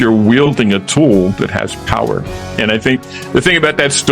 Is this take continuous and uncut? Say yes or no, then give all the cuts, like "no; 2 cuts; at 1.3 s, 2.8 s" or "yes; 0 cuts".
no; 1 cut; at 2.5 s